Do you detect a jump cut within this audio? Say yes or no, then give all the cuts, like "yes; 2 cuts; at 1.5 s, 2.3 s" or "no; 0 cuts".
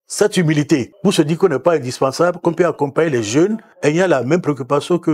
yes; 2 cuts; at 0.9 s, 3.7 s